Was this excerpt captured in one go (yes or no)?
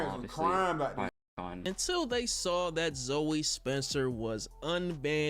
no